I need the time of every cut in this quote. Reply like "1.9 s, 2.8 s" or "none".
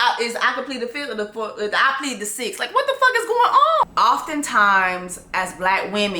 3.8 s